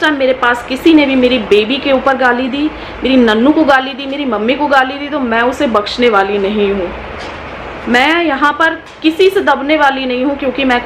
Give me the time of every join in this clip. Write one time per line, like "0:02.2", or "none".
none